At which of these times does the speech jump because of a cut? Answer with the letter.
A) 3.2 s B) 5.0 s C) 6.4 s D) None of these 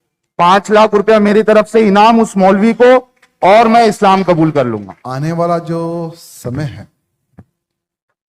B